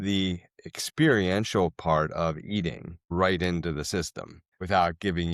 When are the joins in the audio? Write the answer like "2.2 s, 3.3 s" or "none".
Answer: 3.1 s, 4.6 s